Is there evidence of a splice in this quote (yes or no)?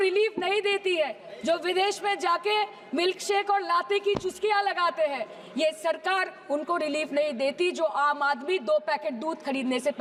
no